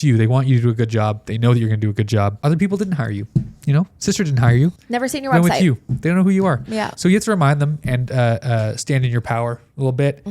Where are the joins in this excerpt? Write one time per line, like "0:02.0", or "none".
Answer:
0:02.4
0:04.8

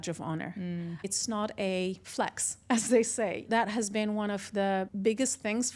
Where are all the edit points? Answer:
0:01.1
0:02.0
0:03.5
0:04.9

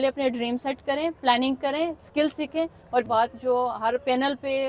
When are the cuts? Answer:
0:03.1

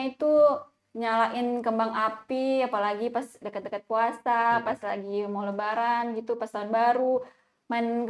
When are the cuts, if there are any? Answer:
none

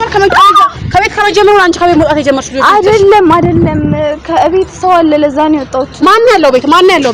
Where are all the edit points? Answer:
none

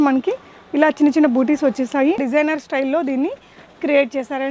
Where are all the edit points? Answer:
0:02.2

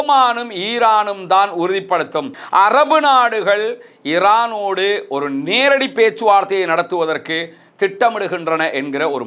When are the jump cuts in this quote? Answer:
0:02.4

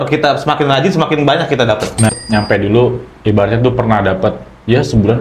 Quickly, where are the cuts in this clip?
0:02.1

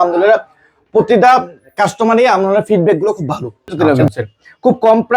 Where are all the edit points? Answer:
0:03.9

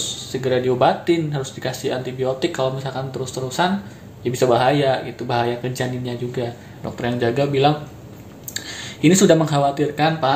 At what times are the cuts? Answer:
0:06.8

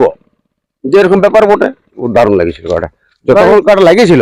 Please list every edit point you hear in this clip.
0:02.0

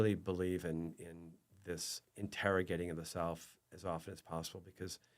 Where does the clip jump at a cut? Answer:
0:02.0

